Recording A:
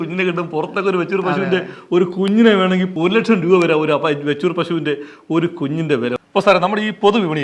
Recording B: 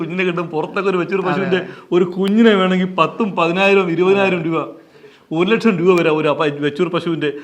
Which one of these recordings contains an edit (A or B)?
A